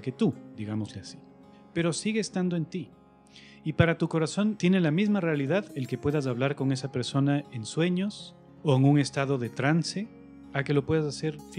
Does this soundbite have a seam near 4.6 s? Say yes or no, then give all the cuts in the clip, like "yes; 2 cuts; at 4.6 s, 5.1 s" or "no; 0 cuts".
yes; 1 cut; at 4.6 s